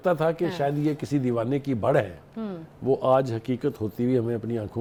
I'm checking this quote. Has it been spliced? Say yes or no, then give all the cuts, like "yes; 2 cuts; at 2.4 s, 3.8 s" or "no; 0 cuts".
no; 0 cuts